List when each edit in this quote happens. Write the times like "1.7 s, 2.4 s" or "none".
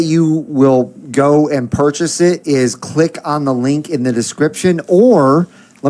none